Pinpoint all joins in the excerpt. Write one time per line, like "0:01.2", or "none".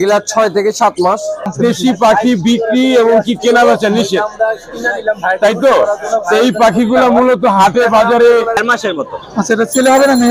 0:01.5
0:08.6